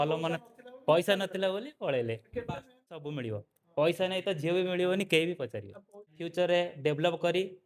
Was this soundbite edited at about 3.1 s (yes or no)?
yes